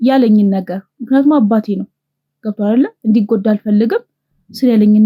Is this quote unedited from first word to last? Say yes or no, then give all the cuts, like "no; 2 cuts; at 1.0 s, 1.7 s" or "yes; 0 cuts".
yes; 0 cuts